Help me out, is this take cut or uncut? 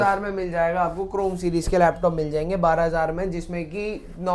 uncut